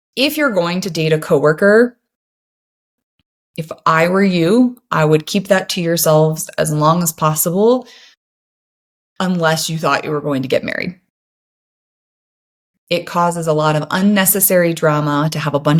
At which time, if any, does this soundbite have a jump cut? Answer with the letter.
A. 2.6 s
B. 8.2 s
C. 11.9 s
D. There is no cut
D